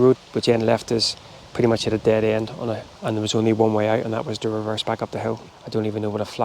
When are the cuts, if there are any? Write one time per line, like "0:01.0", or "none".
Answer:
0:02.9
0:05.5